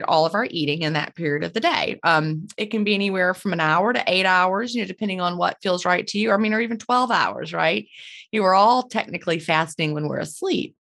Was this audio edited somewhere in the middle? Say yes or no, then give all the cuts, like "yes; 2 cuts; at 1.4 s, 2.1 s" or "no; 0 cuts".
no; 0 cuts